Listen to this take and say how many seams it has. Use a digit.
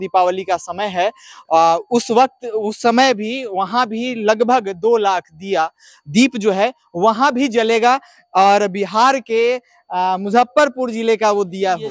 0